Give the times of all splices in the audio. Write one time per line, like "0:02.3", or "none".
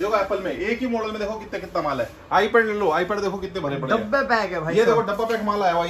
none